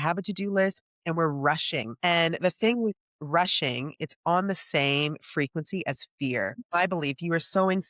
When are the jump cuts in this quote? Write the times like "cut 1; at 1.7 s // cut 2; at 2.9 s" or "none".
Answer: cut 1; at 6.6 s

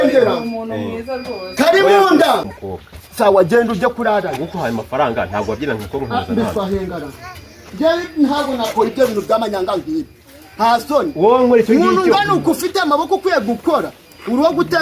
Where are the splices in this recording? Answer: cut 1; at 2.5 s

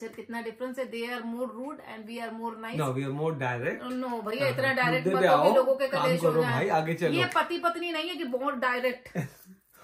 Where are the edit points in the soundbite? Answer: none

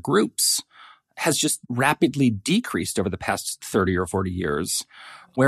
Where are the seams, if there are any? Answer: cut 1; at 1.6 s

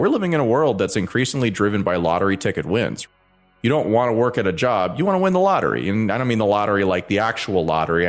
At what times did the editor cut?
cut 1; at 3.2 s

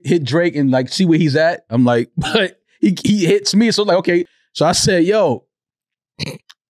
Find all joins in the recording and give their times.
cut 1; at 4.4 s

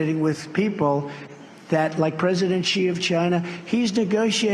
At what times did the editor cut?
cut 1; at 1.6 s

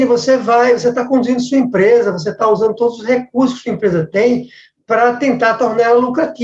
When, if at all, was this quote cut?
none

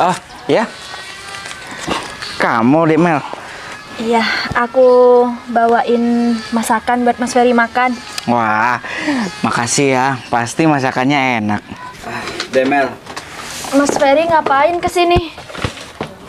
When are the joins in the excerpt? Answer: cut 1; at 12.4 s

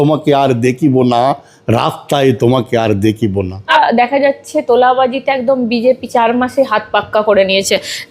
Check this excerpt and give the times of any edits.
cut 1; at 3.7 s

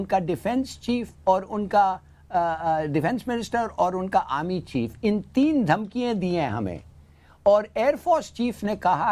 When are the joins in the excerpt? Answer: none

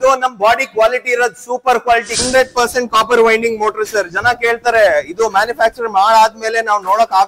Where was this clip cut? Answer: cut 1; at 2.2 s

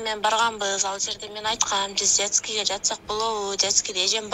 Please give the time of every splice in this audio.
none

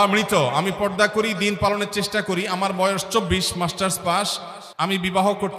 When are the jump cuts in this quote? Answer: none

